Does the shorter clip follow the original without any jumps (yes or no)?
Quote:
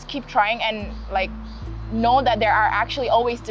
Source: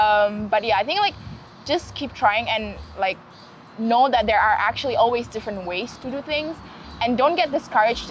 yes